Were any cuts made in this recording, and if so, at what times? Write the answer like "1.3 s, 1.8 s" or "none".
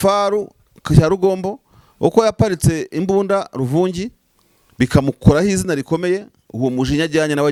none